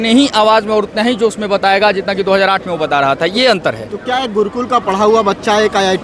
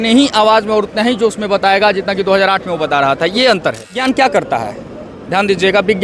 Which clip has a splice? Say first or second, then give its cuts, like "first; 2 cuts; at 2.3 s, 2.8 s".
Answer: second; 1 cut; at 4.0 s